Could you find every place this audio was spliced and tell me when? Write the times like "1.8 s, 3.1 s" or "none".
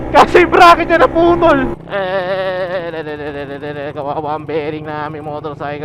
1.7 s